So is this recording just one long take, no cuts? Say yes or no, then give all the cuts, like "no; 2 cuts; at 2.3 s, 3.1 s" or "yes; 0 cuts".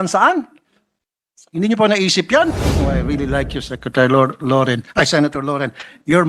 no; 1 cut; at 2.5 s